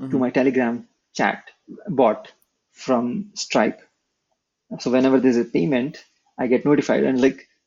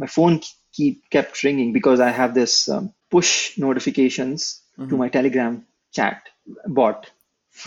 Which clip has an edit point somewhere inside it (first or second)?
second